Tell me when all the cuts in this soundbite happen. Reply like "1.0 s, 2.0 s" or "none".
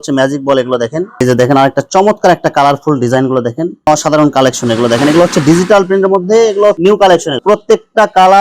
1.2 s, 3.7 s, 7.4 s